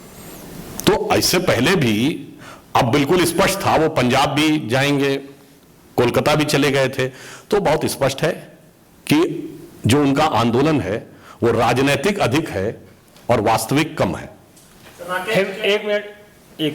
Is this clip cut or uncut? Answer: uncut